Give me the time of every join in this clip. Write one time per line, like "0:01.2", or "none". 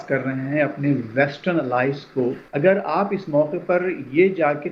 0:02.4